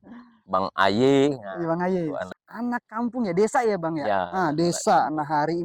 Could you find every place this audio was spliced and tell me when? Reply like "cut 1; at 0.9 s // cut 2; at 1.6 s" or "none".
cut 1; at 2.3 s